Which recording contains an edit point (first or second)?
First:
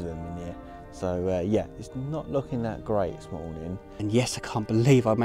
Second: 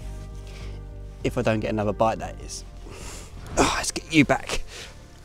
first